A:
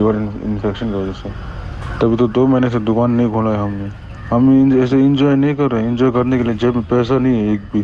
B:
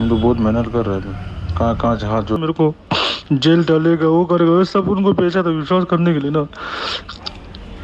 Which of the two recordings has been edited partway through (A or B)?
B